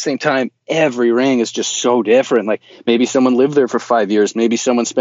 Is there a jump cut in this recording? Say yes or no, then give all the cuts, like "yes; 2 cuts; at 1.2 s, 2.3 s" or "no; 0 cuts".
no; 0 cuts